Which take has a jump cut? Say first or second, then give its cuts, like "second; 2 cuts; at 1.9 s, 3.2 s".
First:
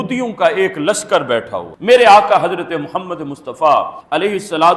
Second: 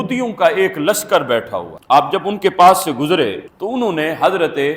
first; 1 cut; at 1.7 s